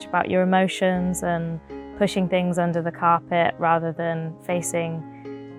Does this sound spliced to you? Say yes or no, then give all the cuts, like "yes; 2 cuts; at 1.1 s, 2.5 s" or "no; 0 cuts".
no; 0 cuts